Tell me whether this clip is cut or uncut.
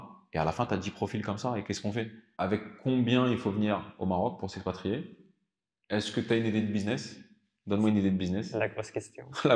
cut